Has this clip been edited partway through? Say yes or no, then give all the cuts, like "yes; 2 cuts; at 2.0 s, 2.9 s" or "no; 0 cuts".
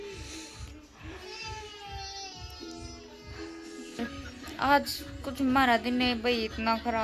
yes; 1 cut; at 4.0 s